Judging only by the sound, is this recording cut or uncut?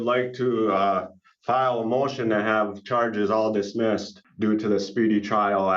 cut